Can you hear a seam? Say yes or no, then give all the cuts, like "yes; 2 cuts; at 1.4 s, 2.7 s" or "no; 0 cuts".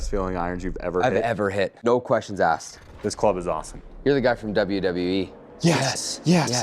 yes; 3 cuts; at 1.8 s, 2.7 s, 5.4 s